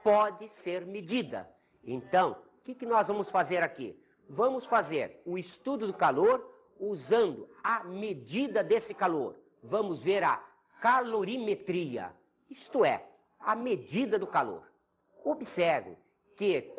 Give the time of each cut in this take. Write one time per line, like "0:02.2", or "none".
0:06.1